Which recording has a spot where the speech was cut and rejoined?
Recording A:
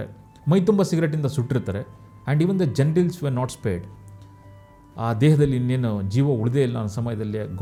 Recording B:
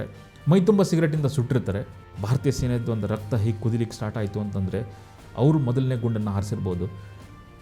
B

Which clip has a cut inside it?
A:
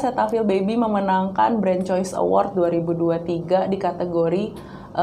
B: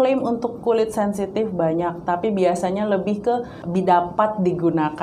B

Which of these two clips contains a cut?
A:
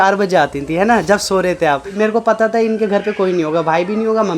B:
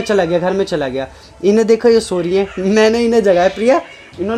A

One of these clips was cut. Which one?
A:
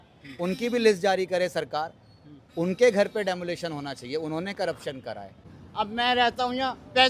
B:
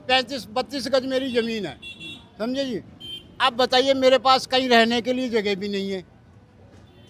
A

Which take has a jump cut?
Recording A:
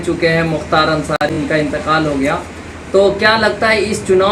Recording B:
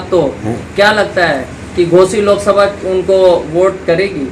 A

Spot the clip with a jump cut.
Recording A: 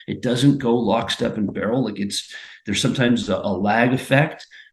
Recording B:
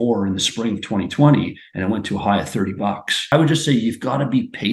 B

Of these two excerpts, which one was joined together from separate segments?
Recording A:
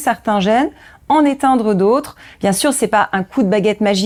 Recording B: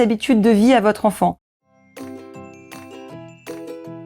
B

